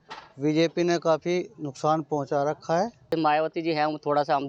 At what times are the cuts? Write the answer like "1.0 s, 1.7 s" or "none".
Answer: 3.1 s